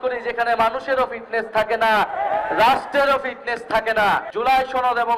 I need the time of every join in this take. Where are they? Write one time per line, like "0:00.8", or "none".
0:04.3